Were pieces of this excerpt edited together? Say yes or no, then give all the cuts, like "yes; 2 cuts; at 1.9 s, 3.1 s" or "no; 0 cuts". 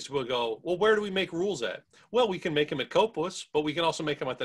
no; 0 cuts